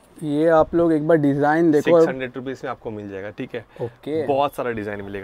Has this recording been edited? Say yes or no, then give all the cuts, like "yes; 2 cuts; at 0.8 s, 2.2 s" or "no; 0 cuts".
no; 0 cuts